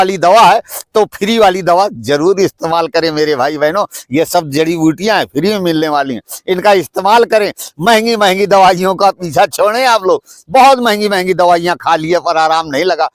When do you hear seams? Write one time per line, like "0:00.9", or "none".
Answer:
none

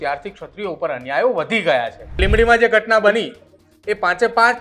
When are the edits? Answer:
0:02.2

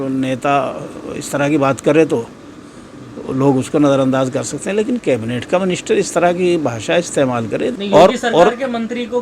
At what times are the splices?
0:07.7

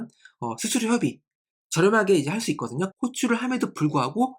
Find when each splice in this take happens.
0:02.9

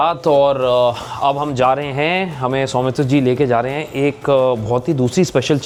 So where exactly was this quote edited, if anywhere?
none

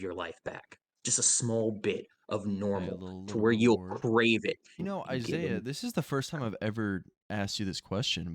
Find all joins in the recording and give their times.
0:04.8

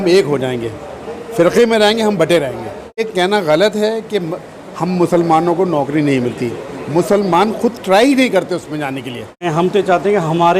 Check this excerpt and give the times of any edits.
0:03.1
0:09.5

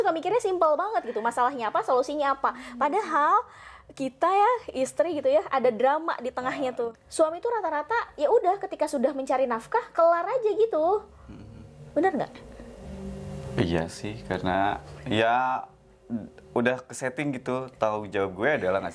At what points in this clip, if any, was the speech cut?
0:06.8

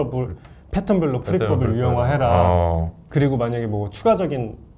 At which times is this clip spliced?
0:03.0

